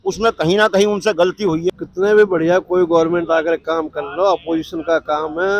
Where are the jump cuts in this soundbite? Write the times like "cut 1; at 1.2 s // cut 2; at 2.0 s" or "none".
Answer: cut 1; at 1.7 s